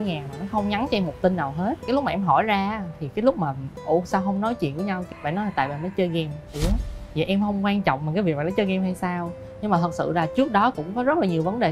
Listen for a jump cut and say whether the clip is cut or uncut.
uncut